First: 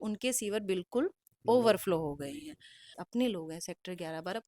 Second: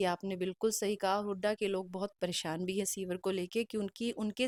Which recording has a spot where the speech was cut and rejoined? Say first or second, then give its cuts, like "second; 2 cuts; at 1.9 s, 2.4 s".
first; 1 cut; at 3.0 s